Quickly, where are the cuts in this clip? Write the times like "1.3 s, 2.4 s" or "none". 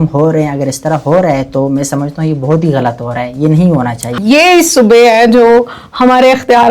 4.2 s